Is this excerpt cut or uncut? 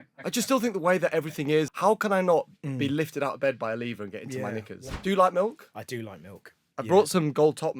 cut